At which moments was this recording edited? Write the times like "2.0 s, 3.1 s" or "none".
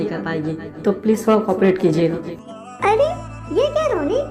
2.5 s